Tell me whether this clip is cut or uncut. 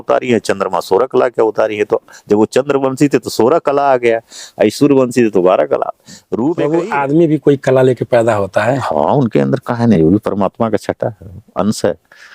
cut